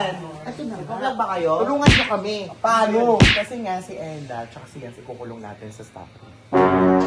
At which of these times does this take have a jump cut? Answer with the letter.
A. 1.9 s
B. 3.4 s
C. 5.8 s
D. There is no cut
D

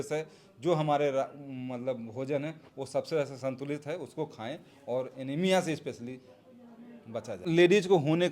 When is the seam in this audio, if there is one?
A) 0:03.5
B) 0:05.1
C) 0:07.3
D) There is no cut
C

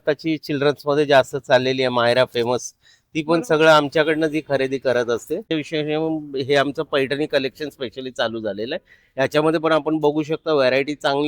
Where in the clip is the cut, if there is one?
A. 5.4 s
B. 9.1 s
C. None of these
A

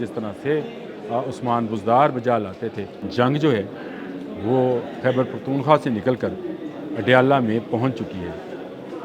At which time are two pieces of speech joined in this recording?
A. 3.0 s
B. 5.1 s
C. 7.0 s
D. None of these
A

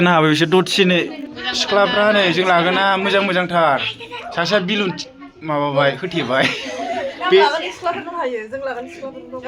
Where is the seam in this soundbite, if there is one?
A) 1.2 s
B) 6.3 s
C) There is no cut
A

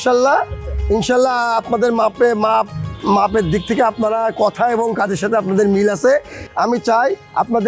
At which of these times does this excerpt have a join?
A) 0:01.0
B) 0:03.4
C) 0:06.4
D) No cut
C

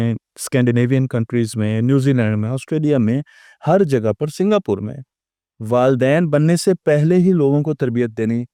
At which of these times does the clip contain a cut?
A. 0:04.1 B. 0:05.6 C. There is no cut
C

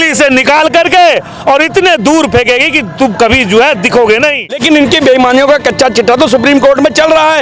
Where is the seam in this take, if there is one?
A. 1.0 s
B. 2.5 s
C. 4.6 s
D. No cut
C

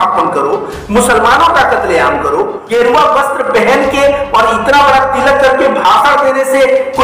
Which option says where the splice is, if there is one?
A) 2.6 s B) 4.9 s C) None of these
A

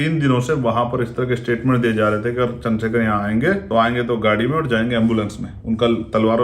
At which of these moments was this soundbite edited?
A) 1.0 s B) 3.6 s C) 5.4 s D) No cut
B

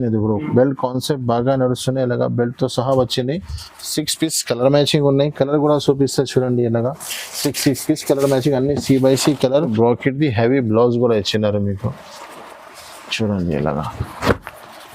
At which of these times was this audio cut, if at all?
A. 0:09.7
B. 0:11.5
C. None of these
A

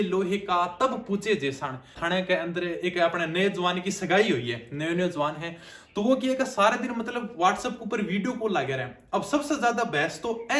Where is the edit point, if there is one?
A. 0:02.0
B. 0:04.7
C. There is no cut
A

